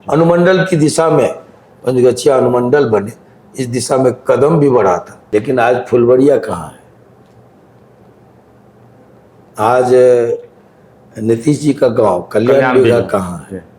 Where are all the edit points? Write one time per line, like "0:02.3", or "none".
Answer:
0:05.1